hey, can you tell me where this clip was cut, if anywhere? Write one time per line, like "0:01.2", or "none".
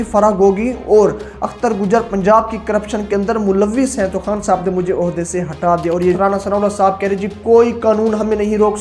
0:06.2